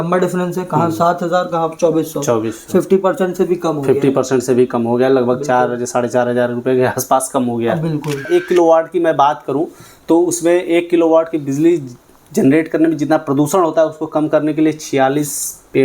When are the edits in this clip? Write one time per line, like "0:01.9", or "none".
0:08.3